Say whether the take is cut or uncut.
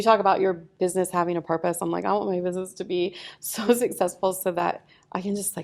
uncut